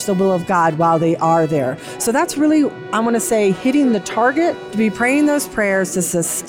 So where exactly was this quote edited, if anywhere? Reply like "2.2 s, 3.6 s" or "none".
4.6 s